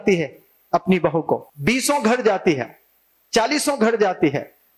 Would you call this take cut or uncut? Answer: cut